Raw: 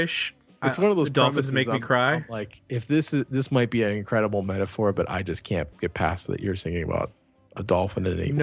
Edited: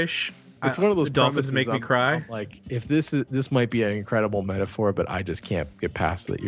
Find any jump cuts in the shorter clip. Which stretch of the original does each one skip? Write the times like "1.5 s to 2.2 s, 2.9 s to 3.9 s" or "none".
none